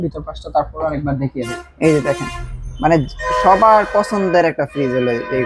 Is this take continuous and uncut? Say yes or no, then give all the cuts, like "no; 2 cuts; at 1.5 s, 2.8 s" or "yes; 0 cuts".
yes; 0 cuts